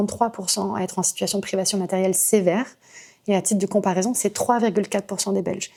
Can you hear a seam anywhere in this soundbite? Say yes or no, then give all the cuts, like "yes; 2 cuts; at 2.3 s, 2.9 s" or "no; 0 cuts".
no; 0 cuts